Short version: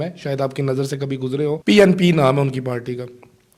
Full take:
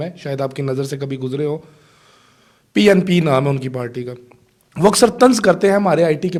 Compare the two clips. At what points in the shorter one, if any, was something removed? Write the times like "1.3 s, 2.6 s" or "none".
1.6 s